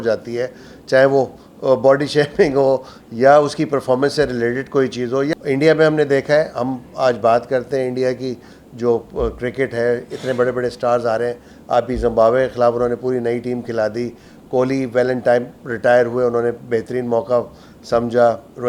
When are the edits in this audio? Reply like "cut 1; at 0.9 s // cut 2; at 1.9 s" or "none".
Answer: cut 1; at 5.3 s